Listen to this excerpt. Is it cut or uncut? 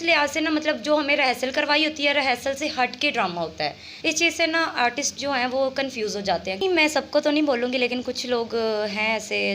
cut